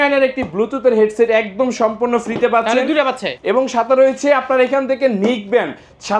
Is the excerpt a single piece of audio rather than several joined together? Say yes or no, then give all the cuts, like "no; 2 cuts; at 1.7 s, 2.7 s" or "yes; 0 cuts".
no; 1 cut; at 3.3 s